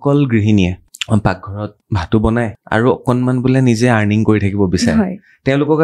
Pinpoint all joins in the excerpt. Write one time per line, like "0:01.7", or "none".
0:00.8
0:01.8
0:02.6